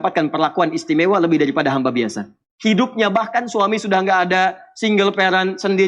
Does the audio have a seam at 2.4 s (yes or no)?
yes